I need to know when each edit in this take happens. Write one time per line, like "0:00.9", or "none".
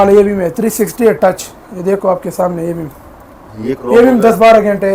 none